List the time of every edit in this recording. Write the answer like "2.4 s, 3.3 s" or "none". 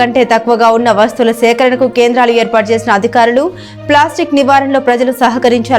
none